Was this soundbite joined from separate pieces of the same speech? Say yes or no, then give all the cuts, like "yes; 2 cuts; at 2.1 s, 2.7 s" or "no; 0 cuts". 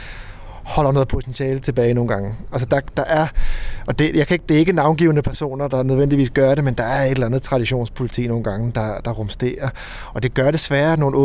no; 0 cuts